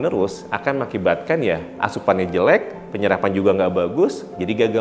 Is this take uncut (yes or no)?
yes